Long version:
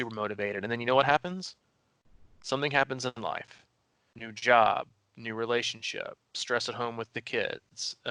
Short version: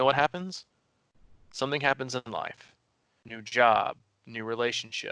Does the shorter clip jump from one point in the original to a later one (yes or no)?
no